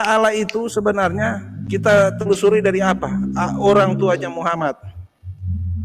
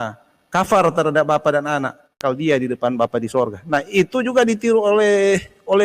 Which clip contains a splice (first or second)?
second